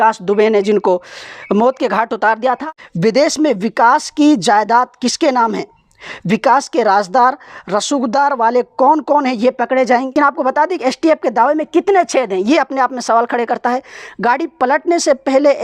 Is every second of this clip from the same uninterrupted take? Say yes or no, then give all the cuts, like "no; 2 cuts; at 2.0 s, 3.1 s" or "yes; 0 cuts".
no; 2 cuts; at 2.6 s, 10.1 s